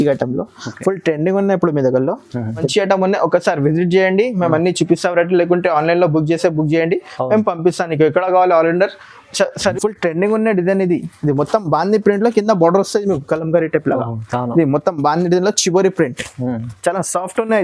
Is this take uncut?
no; 2 cuts; at 2.7 s, 9.7 s

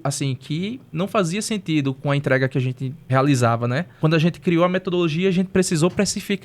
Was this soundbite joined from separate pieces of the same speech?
yes; 3 cuts; at 0.9 s, 2.9 s, 4.0 s

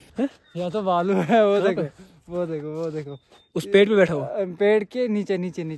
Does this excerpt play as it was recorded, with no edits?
yes; 0 cuts

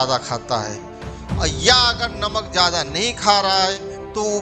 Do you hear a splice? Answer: no; 0 cuts

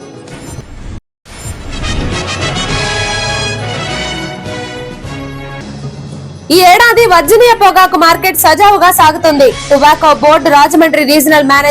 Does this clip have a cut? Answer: yes; 3 cuts; at 1.0 s, 4.7 s, 6.4 s

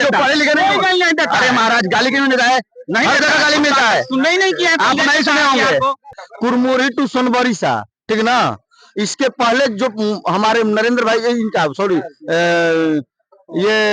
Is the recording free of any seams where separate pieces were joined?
no; 1 cut; at 6.2 s

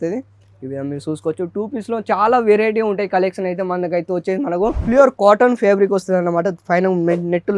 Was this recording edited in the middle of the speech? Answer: yes; 1 cut; at 4.8 s

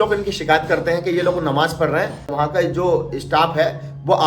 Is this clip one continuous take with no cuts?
no; 1 cut; at 2.3 s

